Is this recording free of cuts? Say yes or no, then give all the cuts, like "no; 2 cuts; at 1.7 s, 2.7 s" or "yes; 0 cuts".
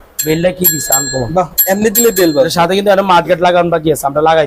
yes; 0 cuts